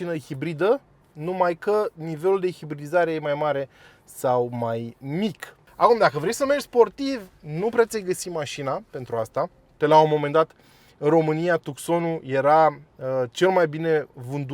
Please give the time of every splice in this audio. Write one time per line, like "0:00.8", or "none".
0:05.5
0:09.7